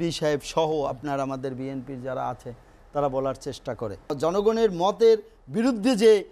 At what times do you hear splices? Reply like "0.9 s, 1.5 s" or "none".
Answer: 4.1 s

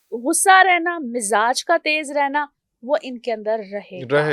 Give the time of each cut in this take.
none

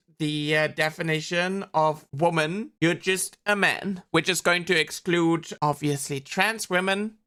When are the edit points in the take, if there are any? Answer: none

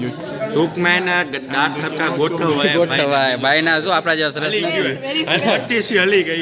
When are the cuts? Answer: none

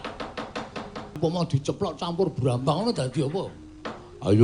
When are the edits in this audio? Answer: 1.2 s

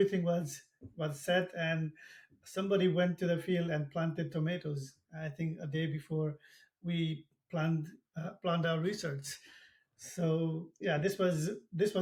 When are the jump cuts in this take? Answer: none

